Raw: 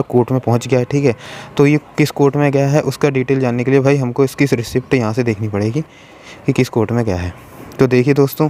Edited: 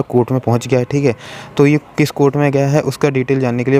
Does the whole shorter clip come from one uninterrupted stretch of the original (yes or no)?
yes